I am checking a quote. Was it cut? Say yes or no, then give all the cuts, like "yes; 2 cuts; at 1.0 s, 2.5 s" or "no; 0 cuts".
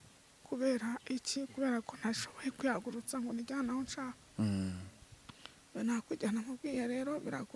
no; 0 cuts